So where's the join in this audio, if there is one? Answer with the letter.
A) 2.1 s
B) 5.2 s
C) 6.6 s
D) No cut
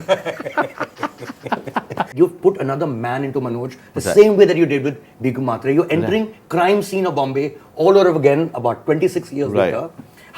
A